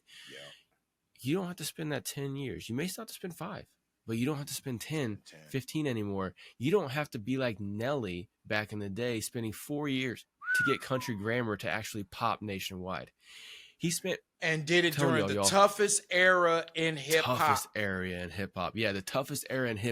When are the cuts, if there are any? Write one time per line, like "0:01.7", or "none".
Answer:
none